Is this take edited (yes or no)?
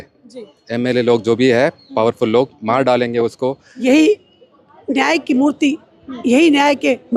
yes